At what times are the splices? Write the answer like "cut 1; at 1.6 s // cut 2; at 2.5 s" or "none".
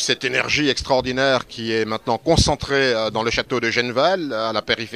cut 1; at 1.6 s